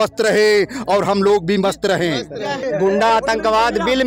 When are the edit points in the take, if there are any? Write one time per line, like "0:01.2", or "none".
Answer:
0:02.6